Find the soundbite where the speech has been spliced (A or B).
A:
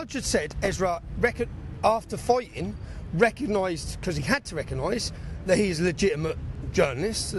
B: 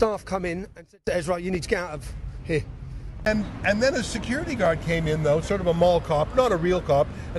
B